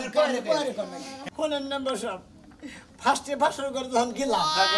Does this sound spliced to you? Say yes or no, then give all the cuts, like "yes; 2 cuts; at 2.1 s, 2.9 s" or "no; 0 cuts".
yes; 1 cut; at 1.3 s